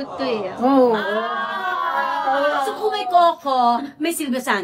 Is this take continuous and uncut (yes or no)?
yes